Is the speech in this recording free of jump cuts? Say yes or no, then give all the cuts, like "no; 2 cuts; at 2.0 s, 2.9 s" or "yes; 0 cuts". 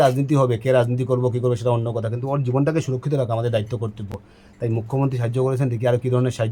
yes; 0 cuts